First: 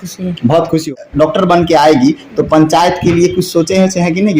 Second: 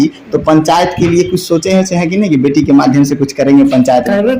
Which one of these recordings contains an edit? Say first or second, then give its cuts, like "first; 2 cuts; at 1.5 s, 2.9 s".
first; 1 cut; at 1.0 s